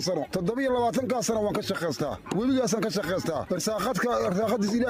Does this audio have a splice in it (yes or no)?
no